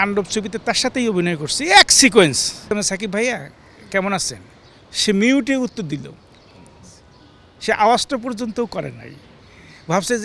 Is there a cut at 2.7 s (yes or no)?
yes